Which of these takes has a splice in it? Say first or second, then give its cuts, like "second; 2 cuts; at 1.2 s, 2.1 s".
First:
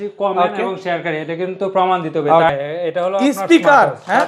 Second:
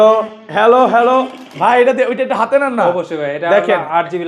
first; 1 cut; at 2.5 s